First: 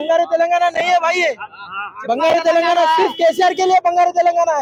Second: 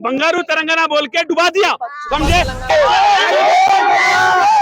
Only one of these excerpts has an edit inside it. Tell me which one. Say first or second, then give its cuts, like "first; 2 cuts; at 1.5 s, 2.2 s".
second; 1 cut; at 2.7 s